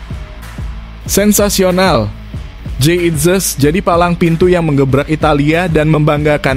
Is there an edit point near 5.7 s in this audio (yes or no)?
no